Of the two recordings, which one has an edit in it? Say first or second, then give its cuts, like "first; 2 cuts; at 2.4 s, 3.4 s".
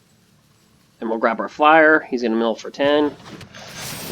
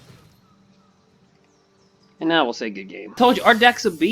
second; 1 cut; at 3.2 s